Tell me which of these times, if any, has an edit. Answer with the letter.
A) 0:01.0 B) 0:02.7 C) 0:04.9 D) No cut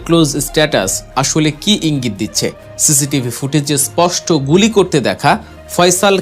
B